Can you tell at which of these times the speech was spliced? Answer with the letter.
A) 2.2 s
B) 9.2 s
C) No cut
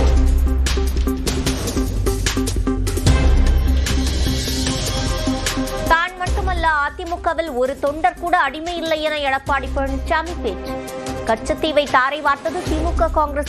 A